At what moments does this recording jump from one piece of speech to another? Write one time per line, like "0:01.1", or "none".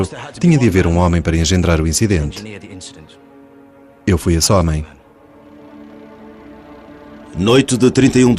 0:07.4